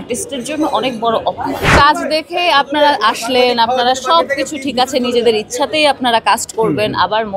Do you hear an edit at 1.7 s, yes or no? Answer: yes